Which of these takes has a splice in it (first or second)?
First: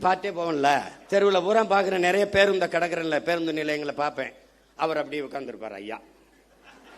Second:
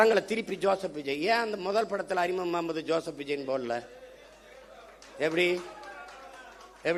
first